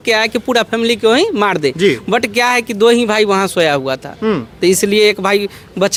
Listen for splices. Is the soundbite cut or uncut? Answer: uncut